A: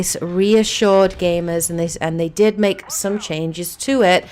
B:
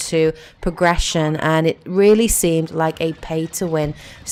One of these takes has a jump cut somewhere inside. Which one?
A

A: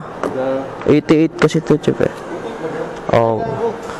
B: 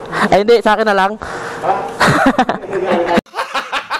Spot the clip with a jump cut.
B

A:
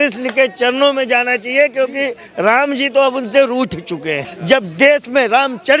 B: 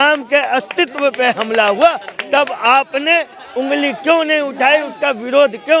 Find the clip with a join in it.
A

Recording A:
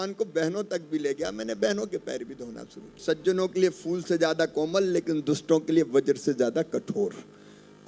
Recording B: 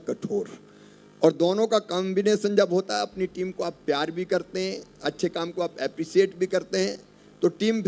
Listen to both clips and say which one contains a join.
A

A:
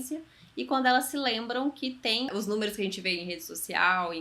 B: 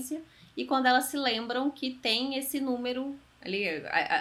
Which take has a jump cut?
A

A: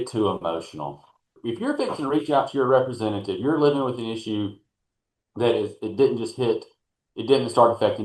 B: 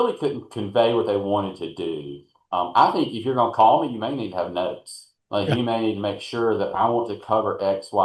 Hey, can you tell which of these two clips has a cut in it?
A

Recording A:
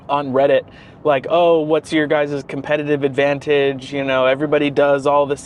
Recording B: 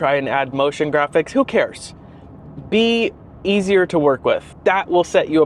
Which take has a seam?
B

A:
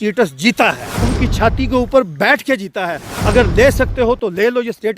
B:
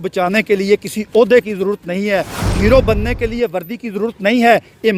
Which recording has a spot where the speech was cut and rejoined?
A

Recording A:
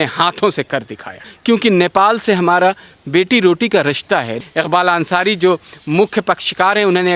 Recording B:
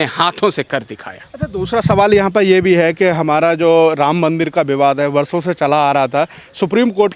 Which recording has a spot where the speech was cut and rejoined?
A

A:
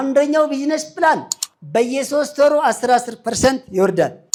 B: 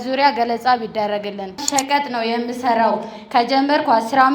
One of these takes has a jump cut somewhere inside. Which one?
B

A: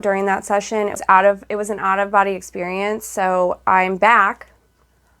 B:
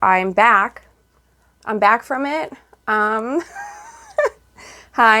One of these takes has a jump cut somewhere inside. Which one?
A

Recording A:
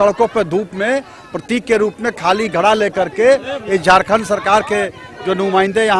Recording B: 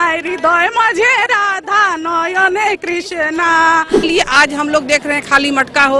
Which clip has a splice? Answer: B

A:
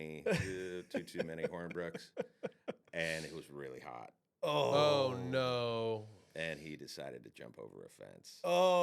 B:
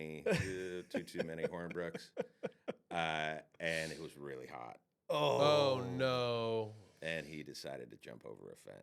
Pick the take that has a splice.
A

